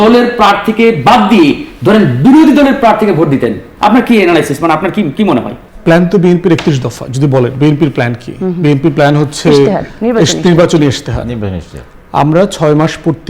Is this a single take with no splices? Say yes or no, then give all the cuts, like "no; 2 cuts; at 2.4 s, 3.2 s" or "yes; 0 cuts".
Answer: no; 1 cut; at 5.6 s